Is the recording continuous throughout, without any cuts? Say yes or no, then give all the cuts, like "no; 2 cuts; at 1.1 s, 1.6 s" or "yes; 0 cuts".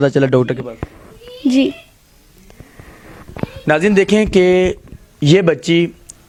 yes; 0 cuts